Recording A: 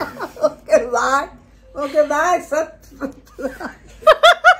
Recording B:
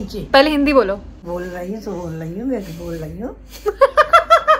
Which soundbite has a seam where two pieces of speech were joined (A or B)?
B